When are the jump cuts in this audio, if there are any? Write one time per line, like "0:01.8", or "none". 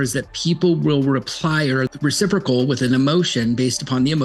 0:01.9